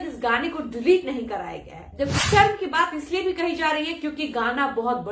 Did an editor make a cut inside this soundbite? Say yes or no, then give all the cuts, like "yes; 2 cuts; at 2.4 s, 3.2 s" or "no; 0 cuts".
yes; 1 cut; at 2.1 s